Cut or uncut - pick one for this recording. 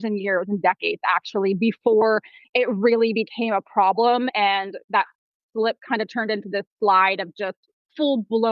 uncut